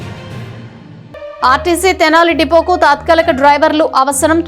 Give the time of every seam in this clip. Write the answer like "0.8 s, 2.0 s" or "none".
0.9 s